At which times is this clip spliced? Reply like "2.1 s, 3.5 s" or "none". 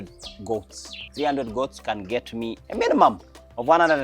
1.0 s, 2.6 s